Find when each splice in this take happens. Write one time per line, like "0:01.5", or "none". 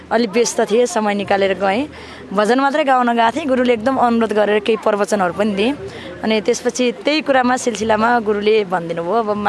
none